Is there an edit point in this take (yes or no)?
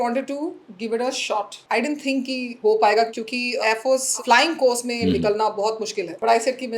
no